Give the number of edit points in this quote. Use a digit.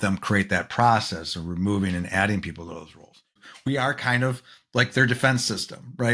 1